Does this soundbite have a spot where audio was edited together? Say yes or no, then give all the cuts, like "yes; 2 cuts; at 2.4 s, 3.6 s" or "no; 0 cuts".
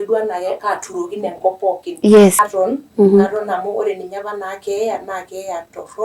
yes; 1 cut; at 2.4 s